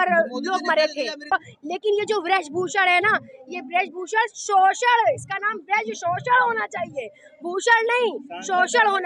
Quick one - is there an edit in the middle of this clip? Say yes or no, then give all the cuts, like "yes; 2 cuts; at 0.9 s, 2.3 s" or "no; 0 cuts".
yes; 1 cut; at 1.3 s